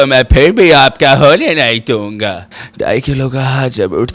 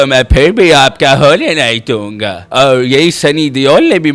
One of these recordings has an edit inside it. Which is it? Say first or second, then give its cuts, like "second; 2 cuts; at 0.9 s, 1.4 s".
first; 1 cut; at 2.5 s